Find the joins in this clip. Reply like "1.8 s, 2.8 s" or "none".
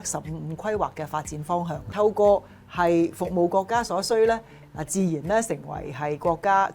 1.9 s